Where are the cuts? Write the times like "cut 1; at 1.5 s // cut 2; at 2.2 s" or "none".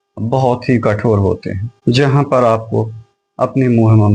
none